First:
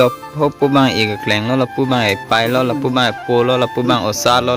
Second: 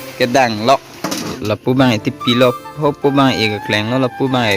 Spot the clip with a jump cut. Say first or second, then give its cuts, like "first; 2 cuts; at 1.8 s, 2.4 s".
second; 1 cut; at 1.4 s